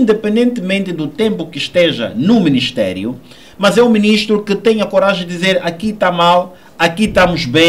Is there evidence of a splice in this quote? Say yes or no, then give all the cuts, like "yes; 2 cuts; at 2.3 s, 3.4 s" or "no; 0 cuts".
no; 0 cuts